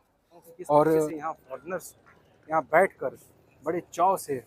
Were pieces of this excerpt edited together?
yes; 1 cut; at 1.2 s

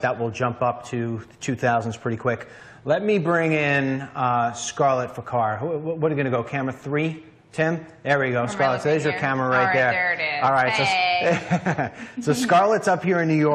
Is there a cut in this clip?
yes; 1 cut; at 11.6 s

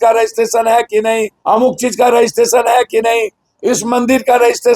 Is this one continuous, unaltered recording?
no; 1 cut; at 1.3 s

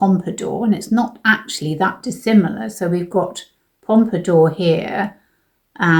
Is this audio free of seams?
yes; 0 cuts

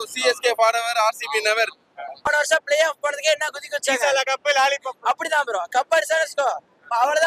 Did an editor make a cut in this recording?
yes; 1 cut; at 2.0 s

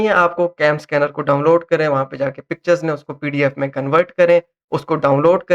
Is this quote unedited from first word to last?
yes; 0 cuts

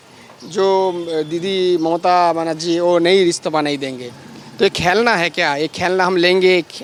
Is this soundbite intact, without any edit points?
yes; 0 cuts

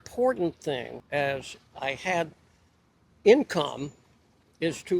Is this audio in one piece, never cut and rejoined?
no; 1 cut; at 1.0 s

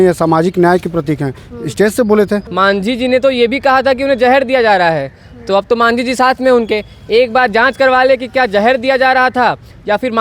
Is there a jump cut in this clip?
yes; 1 cut; at 2.5 s

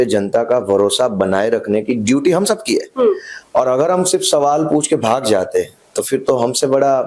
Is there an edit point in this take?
no; 0 cuts

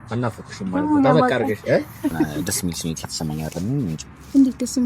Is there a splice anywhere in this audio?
yes; 1 cut; at 2.4 s

